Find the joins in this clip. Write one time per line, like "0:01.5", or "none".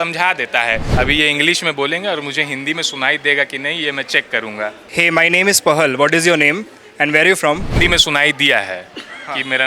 0:00.9
0:04.8
0:07.8